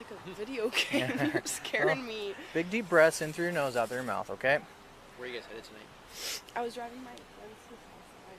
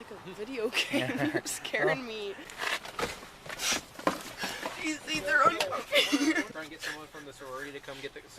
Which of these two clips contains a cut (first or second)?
second